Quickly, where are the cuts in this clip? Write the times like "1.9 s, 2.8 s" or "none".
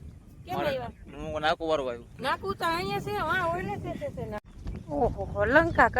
2.1 s, 4.4 s